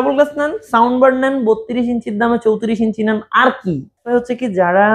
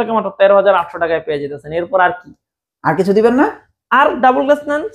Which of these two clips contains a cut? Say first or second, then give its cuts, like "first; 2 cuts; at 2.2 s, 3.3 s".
first; 1 cut; at 4.0 s